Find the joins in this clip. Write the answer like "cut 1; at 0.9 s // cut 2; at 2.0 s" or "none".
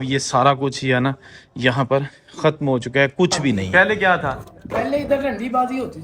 cut 1; at 3.7 s